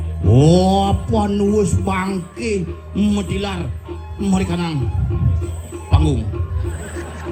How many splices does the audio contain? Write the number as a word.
zero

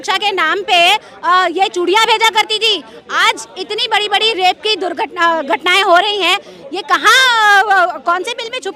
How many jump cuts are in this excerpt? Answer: zero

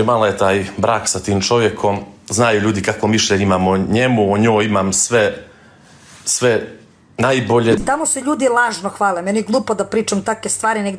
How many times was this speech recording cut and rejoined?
one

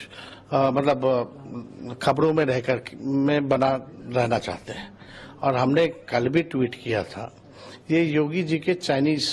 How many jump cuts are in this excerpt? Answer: one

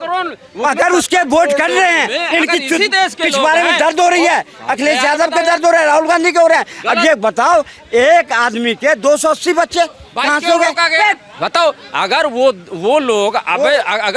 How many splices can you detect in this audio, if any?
zero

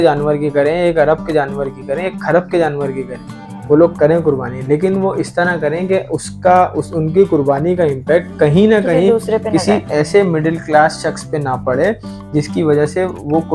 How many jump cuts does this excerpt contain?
zero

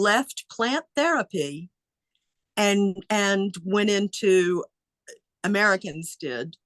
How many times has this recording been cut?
zero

